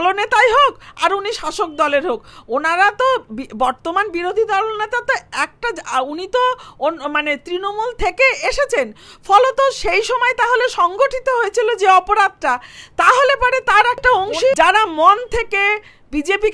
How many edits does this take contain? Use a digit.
1